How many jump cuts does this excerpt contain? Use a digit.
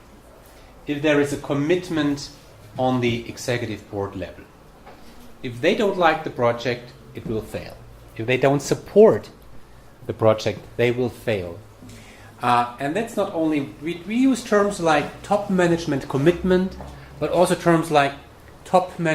1